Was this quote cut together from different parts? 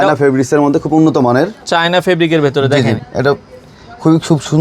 no; 0 cuts

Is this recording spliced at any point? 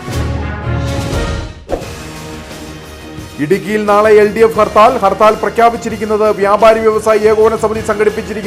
yes; 1 cut; at 1.8 s

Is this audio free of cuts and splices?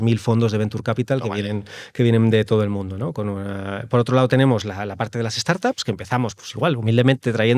yes; 0 cuts

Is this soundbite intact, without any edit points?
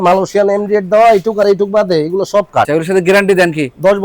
no; 1 cut; at 2.7 s

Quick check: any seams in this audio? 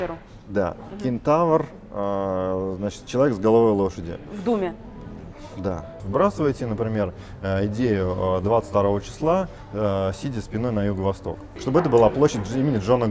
yes; 2 cuts; at 6.0 s, 11.5 s

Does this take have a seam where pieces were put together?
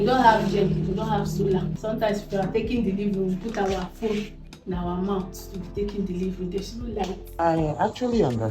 yes; 2 cuts; at 1.8 s, 7.3 s

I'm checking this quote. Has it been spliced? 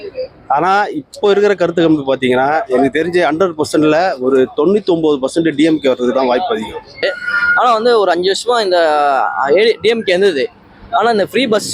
yes; 1 cut; at 7.0 s

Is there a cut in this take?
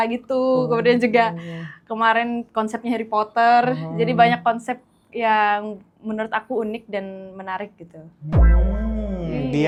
no; 0 cuts

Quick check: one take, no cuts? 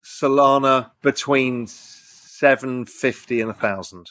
no; 1 cut; at 0.9 s

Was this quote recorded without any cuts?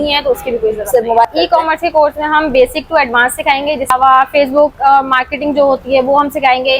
no; 2 cuts; at 1.2 s, 3.9 s

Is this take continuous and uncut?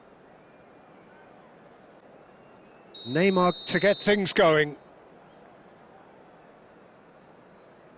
no; 1 cut; at 2.0 s

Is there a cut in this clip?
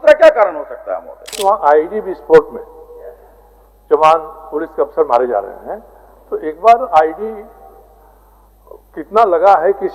yes; 1 cut; at 1.4 s

